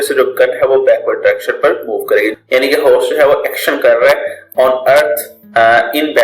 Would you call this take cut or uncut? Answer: cut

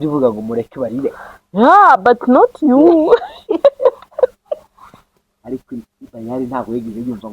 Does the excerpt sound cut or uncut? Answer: cut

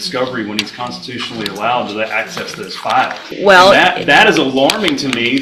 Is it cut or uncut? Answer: cut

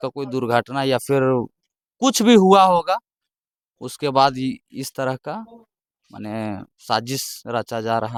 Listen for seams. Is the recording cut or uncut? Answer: uncut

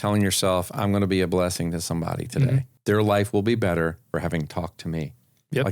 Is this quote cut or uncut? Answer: cut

